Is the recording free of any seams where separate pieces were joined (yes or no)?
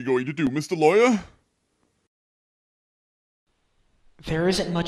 yes